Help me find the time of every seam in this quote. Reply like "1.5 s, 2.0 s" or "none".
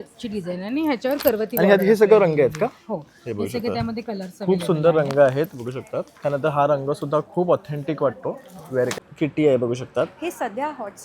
9.0 s